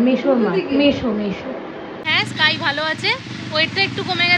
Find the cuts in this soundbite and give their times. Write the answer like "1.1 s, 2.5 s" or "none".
2.1 s